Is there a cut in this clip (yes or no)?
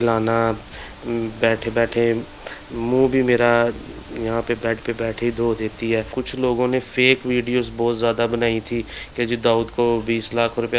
yes